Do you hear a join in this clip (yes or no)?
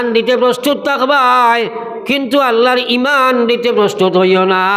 no